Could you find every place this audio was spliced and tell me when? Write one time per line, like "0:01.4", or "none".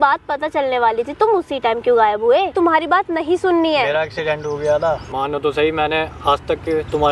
0:02.5
0:05.1